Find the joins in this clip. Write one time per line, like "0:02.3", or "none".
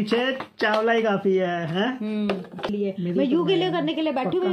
0:02.7